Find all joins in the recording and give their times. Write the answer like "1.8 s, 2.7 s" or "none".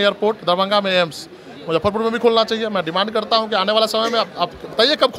none